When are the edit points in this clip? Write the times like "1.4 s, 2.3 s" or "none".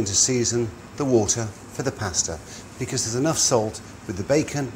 3.8 s